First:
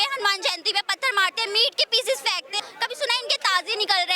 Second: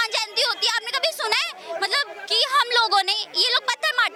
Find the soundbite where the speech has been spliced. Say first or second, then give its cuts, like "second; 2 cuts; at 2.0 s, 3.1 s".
first; 1 cut; at 2.7 s